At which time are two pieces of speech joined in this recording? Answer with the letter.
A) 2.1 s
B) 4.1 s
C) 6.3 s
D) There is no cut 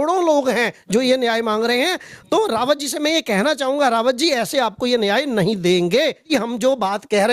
C